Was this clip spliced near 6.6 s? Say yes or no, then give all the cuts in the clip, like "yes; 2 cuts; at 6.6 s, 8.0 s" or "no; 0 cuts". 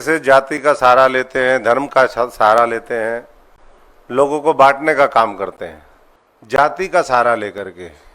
yes; 1 cut; at 6.6 s